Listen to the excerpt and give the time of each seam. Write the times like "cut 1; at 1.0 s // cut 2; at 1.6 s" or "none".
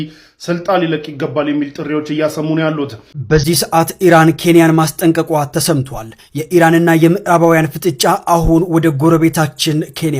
cut 1; at 3.1 s